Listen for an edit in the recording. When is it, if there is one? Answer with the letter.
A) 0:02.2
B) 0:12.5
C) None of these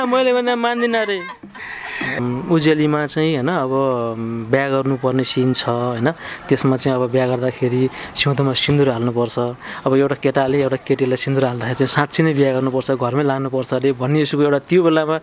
A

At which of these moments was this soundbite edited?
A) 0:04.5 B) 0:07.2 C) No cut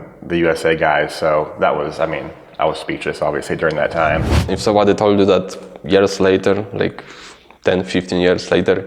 A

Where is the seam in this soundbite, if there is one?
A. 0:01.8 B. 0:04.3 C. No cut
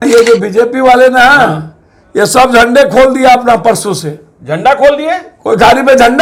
C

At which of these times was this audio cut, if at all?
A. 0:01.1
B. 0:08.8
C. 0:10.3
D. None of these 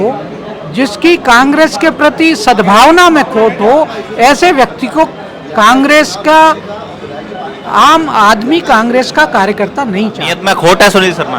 C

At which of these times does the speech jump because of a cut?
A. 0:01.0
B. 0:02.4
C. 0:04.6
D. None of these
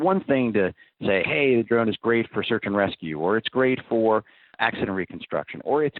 C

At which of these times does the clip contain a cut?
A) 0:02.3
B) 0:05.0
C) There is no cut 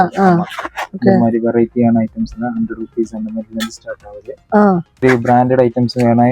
B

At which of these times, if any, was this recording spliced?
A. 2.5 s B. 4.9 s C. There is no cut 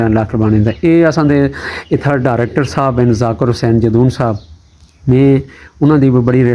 C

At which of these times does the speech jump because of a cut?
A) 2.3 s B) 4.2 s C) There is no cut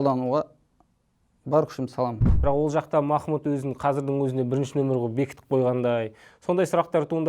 A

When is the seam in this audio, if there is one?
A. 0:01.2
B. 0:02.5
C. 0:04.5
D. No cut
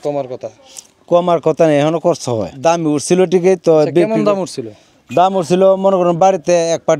B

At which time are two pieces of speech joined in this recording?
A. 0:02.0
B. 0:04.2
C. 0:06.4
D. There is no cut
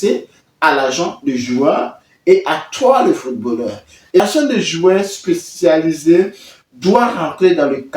B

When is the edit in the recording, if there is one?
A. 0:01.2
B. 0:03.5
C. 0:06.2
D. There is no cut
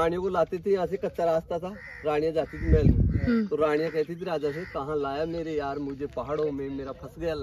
D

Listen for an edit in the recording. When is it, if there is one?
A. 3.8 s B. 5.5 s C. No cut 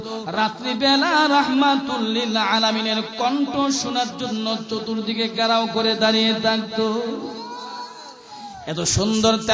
C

